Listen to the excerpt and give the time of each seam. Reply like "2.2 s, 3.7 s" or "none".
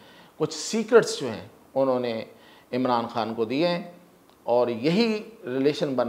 none